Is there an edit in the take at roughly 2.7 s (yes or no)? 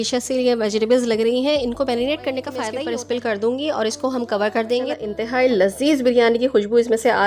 yes